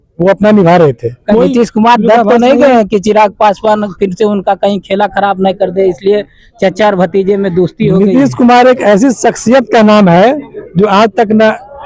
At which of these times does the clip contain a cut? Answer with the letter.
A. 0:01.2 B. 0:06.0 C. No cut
A